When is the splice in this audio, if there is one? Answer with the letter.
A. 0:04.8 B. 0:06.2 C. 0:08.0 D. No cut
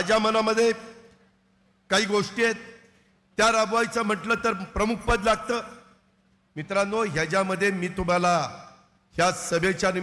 D